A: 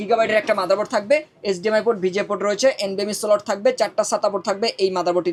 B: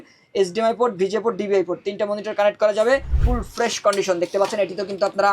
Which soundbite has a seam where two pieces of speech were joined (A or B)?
B